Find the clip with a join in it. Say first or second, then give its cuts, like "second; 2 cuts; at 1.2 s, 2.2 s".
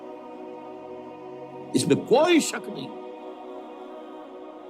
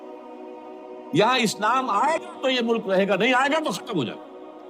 first; 1 cut; at 1.1 s